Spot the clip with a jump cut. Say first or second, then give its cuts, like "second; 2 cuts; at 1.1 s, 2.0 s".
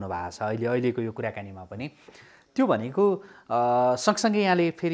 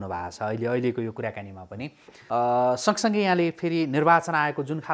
second; 1 cut; at 2.1 s